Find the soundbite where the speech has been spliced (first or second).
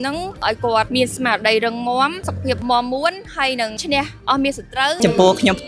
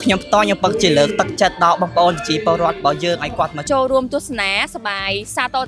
first